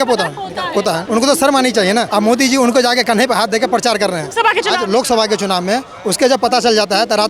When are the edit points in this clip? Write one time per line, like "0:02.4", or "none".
0:01.0
0:02.1
0:04.3